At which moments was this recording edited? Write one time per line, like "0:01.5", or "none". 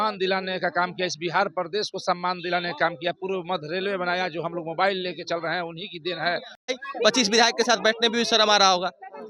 0:06.5